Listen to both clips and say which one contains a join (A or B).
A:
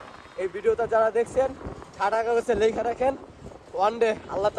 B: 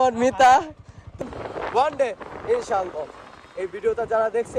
B